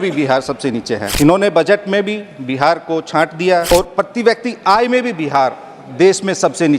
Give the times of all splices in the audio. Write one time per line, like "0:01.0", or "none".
0:01.1
0:03.7